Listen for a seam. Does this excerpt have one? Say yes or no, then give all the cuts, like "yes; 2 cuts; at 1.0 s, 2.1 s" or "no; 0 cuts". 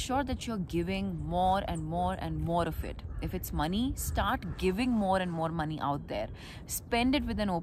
no; 0 cuts